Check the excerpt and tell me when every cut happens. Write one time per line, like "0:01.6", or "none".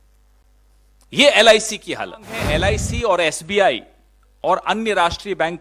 0:02.5